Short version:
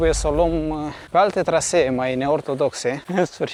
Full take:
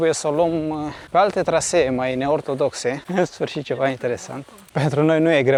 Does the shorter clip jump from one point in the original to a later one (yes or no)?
no